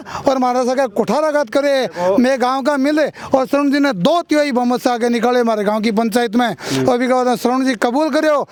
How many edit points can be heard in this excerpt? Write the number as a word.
zero